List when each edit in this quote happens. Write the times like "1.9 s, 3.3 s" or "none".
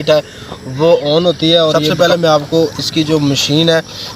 1.8 s